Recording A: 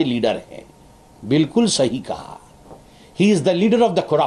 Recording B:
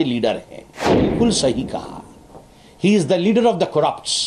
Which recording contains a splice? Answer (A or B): B